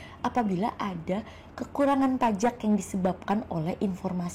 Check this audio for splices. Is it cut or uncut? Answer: uncut